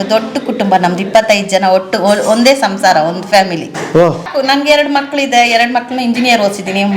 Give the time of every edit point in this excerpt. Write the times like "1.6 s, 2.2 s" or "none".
4.3 s

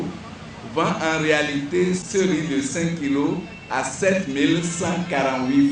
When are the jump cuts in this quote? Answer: 2.0 s

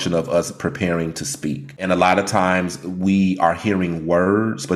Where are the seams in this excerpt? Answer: 1.8 s

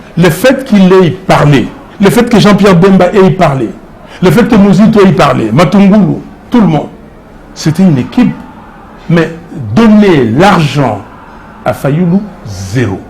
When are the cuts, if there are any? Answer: 1.8 s

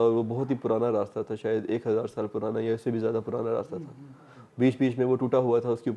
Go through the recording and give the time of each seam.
none

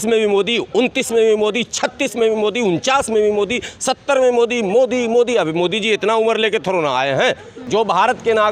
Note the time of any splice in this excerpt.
7.5 s

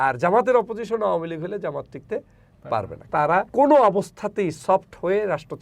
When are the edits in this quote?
3.0 s

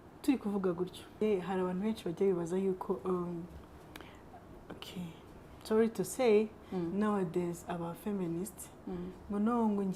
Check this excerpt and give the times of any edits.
1.1 s

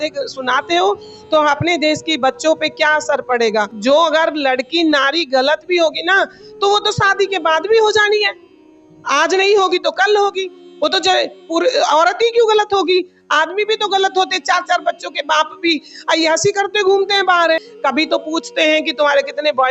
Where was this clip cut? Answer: 3.7 s, 17.7 s

